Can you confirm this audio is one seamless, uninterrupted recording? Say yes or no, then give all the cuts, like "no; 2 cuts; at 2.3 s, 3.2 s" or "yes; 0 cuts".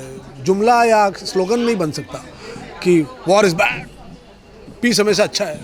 yes; 0 cuts